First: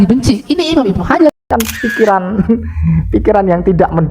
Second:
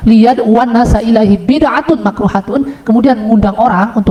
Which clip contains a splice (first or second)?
first